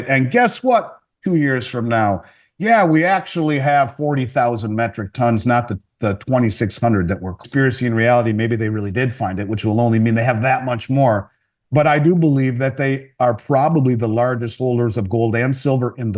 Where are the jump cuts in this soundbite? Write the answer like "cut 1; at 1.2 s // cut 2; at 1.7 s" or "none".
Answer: cut 1; at 7.4 s